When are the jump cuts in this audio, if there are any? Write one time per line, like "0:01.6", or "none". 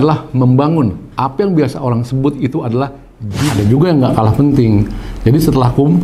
0:03.6